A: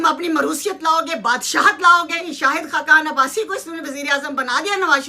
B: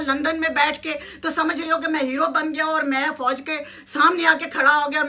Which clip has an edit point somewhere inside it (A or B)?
A